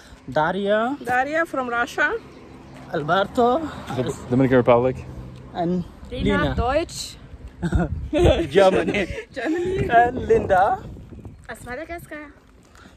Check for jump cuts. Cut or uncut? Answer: uncut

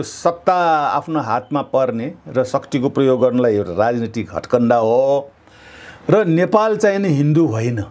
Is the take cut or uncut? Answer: uncut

